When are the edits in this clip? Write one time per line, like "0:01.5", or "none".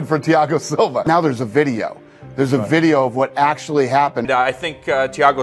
0:01.0
0:04.3